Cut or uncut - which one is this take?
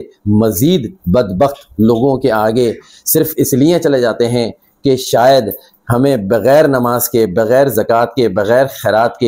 uncut